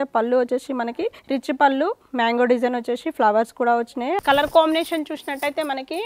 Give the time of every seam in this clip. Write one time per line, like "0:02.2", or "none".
0:01.2
0:04.2